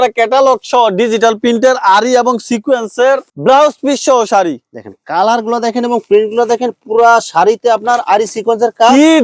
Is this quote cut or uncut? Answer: uncut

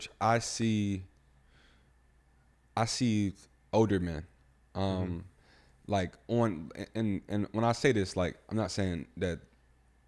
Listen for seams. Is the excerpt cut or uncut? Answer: uncut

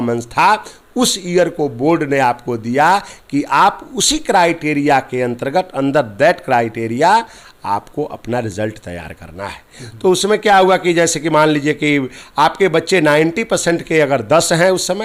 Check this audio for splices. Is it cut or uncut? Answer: uncut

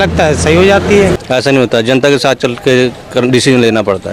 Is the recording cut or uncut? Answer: cut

